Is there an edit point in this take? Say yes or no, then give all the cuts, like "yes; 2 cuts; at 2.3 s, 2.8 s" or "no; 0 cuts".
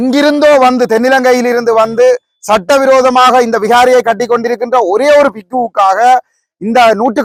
no; 0 cuts